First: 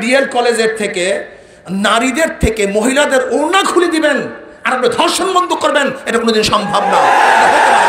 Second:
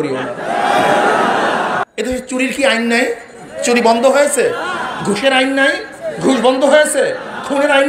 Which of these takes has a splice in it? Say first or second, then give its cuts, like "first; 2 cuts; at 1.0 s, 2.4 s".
second; 1 cut; at 1.8 s